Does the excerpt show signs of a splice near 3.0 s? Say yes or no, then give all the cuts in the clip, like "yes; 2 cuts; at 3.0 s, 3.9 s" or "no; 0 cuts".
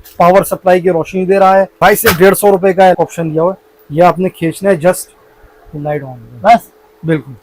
yes; 2 cuts; at 1.8 s, 3.0 s